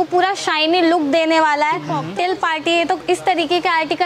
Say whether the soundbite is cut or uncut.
cut